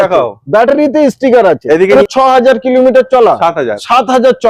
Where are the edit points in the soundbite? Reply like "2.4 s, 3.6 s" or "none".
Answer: 1.9 s